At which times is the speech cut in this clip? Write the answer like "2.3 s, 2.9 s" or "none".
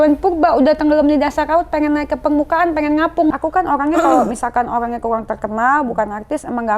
3.3 s